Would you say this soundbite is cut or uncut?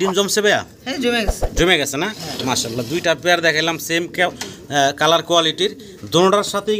uncut